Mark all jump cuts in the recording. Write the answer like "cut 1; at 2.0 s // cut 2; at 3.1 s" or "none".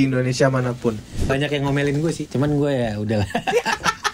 cut 1; at 1.2 s // cut 2; at 2.2 s